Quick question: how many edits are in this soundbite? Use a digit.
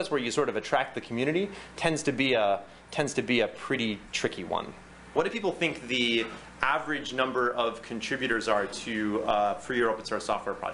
1